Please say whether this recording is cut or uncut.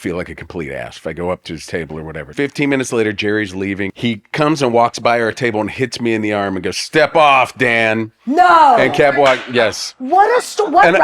cut